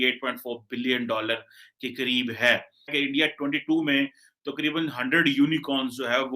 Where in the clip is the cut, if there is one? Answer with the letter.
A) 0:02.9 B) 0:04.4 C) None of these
A